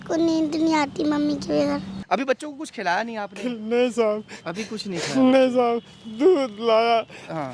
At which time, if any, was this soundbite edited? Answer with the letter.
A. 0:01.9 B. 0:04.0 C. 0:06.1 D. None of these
A